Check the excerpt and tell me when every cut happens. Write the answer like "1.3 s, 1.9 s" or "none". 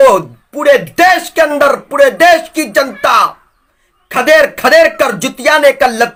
none